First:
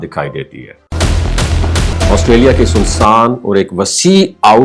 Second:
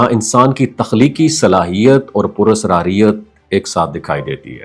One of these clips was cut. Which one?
first; 1 cut; at 1.9 s

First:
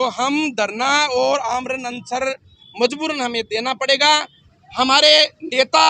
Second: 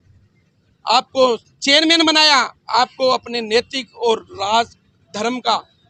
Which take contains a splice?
first; 1 cut; at 4.4 s

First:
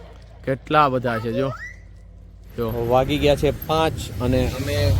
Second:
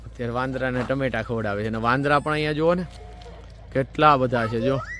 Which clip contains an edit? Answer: first; 1 cut; at 2.8 s

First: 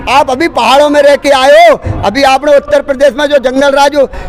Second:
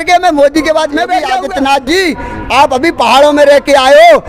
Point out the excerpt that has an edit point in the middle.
second; 1 cut; at 1.3 s

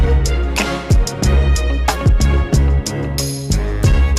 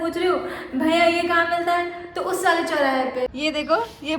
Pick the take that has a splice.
second; 1 cut; at 3.3 s

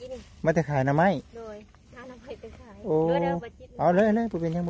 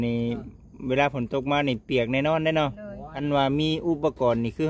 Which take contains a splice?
second; 1 cut; at 3.1 s

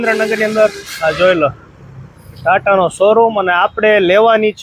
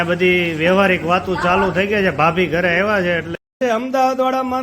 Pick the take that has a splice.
second; 1 cut; at 3.6 s

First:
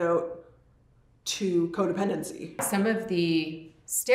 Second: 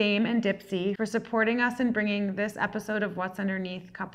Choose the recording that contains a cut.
first; 1 cut; at 2.6 s

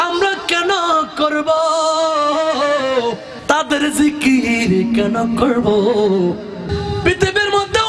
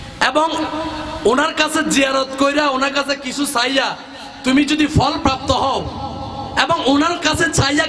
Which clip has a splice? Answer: first; 2 cuts; at 3.3 s, 6.7 s

